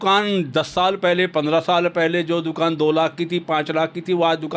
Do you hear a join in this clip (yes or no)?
no